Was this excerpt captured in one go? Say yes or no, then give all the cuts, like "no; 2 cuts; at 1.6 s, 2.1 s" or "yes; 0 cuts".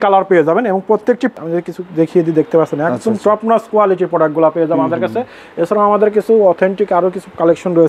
no; 1 cut; at 1.3 s